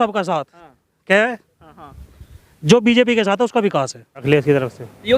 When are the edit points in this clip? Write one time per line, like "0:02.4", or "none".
0:04.2